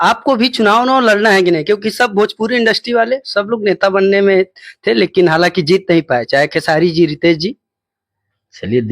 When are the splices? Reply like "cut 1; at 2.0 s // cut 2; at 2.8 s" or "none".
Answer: none